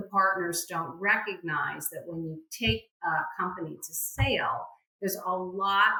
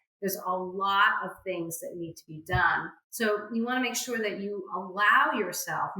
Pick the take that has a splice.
second; 1 cut; at 3.0 s

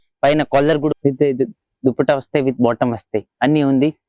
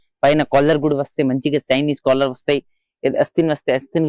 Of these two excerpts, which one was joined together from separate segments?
first; 1 cut; at 1.0 s

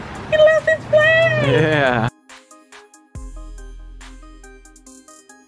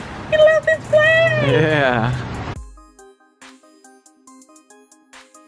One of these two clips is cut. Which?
first; 1 cut; at 2.1 s

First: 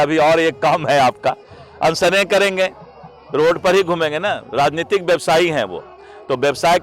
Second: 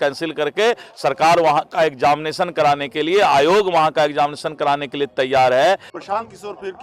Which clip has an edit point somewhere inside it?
second; 1 cut; at 5.9 s

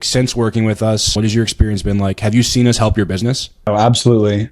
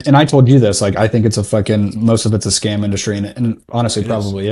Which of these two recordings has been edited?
first; 2 cuts; at 1.1 s, 3.7 s

